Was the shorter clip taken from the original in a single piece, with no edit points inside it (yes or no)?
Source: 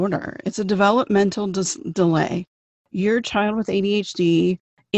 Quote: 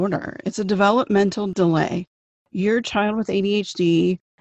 no